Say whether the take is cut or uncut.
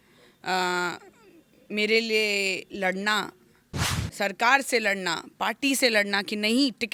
uncut